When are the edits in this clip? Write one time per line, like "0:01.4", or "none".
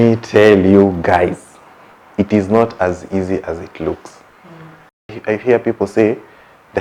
0:05.2